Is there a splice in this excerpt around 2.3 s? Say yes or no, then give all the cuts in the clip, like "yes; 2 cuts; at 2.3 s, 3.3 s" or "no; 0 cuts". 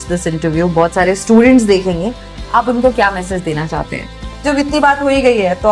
no; 1 cut; at 4.4 s